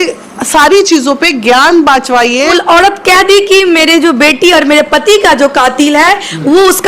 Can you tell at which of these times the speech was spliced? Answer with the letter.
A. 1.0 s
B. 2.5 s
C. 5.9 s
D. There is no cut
B